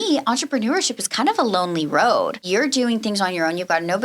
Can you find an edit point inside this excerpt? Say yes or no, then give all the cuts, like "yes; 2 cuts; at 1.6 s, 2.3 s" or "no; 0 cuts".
yes; 1 cut; at 2.4 s